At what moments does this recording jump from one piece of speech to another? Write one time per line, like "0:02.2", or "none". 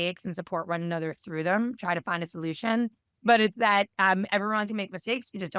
0:03.1

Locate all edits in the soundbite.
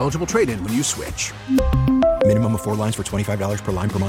none

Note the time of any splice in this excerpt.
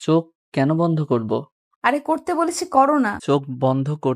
0:03.2

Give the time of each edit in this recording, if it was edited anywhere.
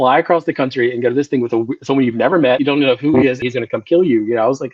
0:02.6
0:03.4

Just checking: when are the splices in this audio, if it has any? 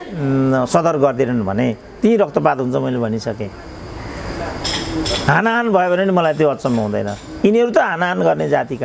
none

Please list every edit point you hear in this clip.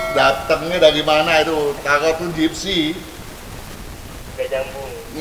none

